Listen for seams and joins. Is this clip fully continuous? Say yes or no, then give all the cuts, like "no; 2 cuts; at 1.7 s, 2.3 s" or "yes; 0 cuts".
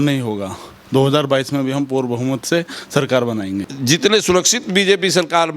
no; 1 cut; at 3.7 s